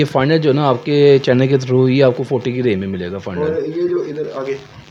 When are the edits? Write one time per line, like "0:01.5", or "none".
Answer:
none